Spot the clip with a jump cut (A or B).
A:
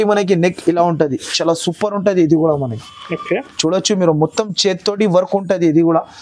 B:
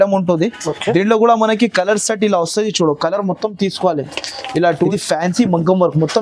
B